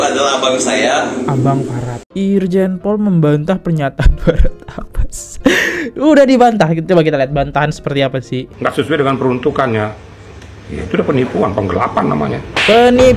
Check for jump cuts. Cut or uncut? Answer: cut